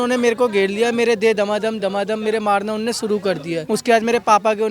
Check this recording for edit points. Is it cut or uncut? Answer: cut